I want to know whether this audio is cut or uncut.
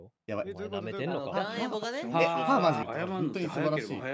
cut